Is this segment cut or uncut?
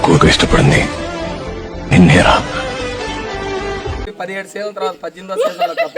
cut